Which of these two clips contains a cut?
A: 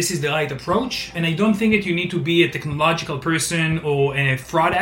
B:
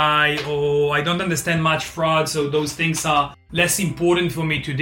A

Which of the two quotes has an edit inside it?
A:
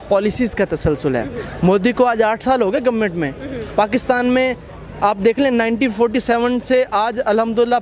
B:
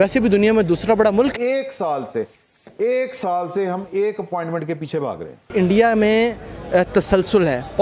B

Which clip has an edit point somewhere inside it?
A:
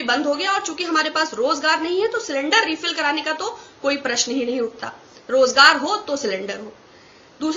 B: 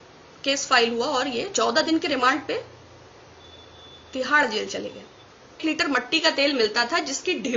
B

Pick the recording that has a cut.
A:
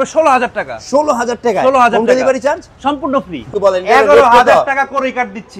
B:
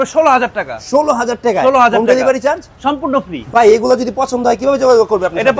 A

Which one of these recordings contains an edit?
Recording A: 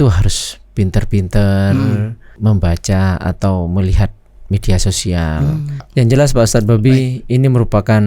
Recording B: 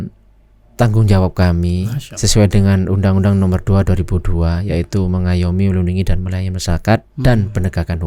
A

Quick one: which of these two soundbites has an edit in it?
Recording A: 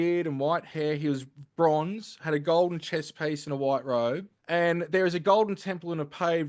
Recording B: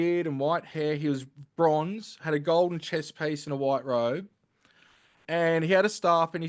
A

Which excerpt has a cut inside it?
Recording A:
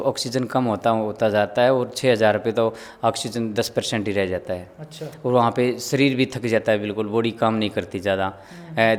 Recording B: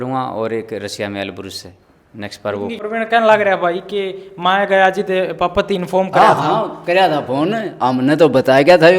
B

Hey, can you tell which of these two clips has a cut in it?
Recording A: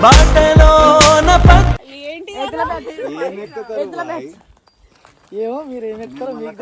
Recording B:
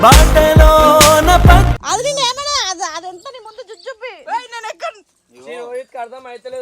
B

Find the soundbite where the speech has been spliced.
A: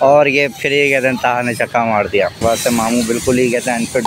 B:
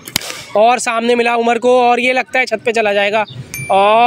A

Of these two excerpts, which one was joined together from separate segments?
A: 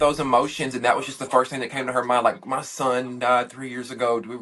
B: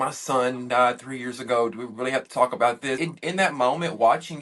B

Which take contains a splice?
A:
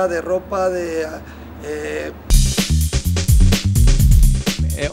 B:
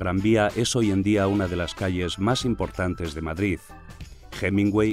A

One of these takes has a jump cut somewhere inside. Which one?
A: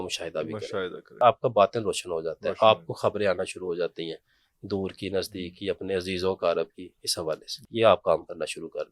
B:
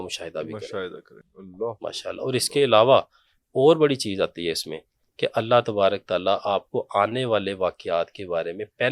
A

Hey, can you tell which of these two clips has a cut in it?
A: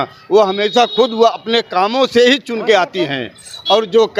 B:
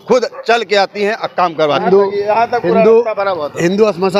B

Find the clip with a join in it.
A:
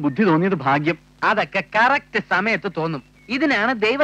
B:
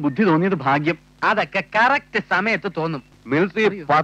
B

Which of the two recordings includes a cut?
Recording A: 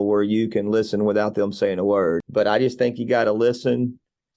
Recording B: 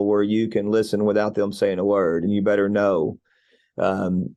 A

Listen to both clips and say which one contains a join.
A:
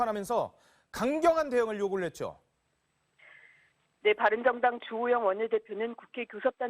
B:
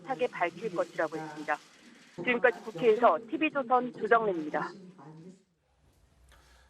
B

